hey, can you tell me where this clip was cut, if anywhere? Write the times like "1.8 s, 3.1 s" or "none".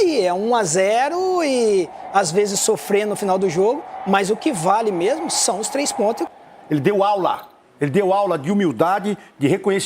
6.3 s

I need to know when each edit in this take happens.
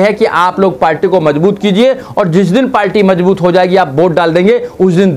none

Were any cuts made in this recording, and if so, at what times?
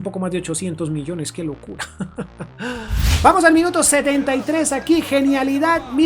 3.0 s

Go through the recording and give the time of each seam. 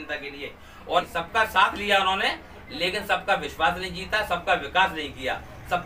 1.1 s

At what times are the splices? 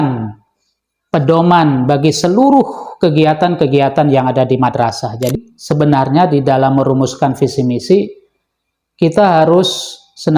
5.3 s

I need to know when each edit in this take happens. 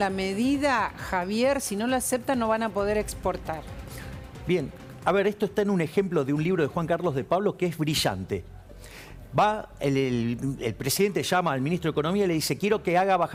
none

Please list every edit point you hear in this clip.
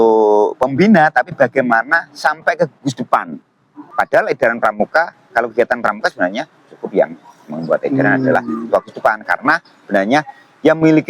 3.9 s

